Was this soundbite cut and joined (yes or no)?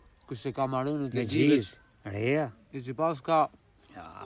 no